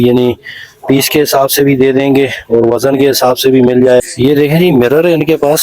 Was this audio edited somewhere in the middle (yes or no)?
yes